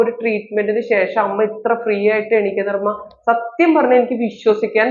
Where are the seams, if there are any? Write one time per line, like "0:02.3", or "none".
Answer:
none